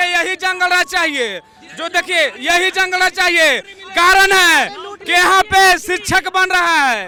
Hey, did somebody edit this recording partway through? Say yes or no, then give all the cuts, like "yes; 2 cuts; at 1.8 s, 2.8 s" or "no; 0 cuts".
no; 0 cuts